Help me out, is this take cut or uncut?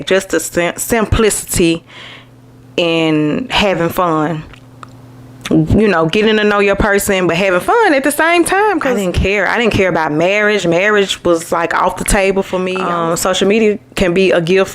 cut